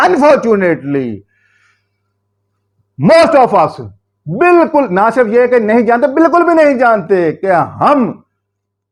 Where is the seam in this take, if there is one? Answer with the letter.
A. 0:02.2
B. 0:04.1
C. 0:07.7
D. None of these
D